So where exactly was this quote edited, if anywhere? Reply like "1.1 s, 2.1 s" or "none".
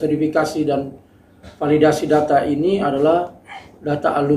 none